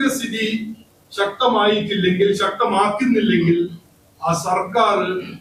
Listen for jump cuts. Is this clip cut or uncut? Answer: uncut